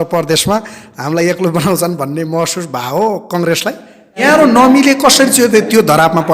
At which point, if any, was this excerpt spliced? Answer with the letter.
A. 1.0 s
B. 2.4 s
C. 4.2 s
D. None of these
C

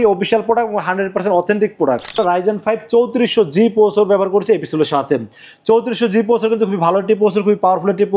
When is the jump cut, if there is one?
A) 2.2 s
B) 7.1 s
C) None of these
A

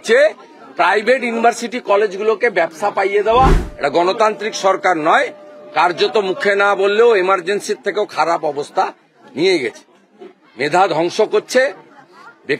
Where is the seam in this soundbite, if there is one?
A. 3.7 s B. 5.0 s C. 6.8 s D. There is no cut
A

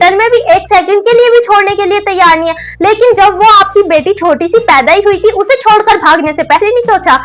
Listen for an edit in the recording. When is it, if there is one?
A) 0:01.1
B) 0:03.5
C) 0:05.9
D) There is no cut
D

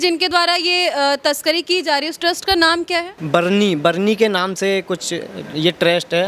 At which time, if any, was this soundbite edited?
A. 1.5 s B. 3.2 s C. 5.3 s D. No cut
B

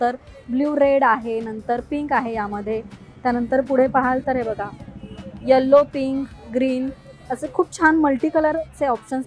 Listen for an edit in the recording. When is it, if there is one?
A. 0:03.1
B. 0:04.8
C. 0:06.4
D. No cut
D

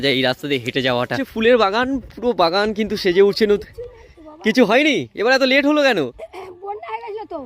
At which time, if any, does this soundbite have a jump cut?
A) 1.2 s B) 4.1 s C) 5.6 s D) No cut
A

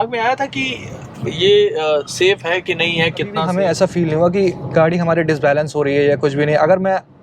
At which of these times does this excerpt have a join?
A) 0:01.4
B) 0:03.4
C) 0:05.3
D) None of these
B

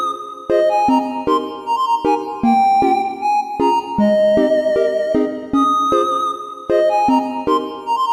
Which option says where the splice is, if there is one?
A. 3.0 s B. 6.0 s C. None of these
A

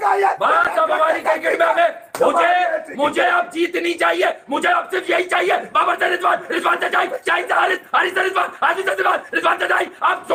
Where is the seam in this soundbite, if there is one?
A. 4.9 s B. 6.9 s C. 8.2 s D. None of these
D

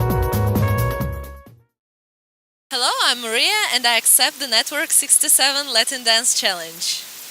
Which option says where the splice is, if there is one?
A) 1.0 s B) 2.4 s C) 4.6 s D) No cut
B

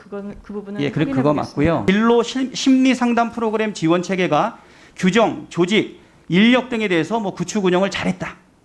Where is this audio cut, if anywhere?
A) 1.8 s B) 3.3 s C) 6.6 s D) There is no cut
A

